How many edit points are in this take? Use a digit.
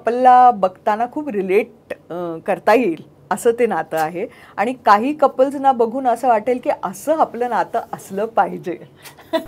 0